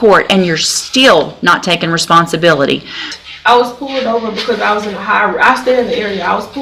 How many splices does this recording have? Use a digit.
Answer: 1